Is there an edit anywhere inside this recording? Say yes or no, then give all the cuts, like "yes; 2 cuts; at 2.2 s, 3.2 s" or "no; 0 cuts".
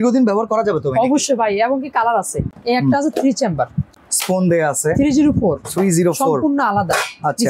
yes; 2 cuts; at 2.5 s, 3.8 s